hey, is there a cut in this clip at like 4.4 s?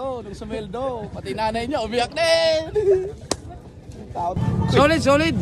yes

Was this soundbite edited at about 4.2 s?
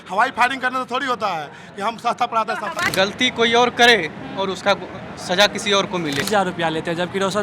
no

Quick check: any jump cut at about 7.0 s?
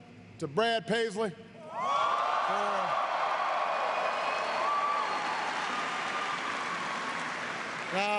no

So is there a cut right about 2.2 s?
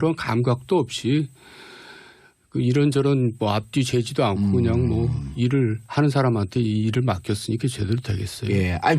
yes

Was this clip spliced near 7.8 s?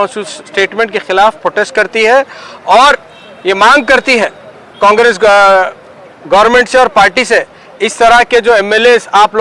no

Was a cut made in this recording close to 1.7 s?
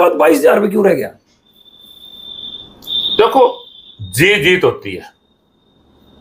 no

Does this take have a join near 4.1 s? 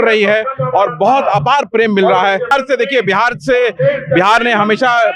no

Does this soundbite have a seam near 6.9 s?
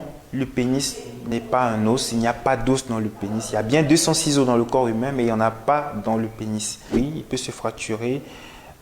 yes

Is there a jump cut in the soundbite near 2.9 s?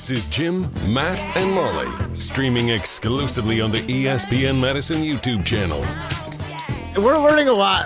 no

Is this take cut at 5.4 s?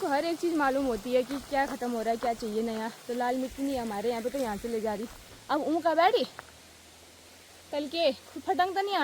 no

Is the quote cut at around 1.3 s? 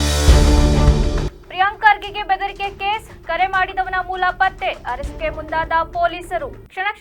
no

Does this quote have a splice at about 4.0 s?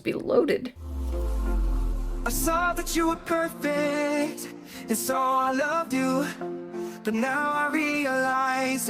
no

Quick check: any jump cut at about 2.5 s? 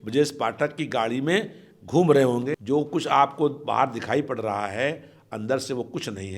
yes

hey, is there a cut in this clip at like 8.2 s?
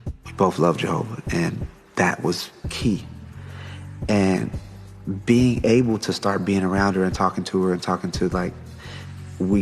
no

